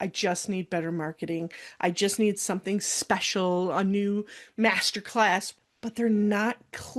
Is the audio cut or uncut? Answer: cut